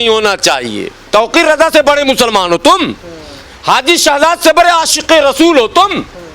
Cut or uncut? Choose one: cut